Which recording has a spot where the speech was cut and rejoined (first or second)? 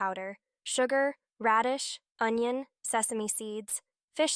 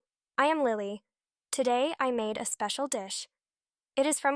first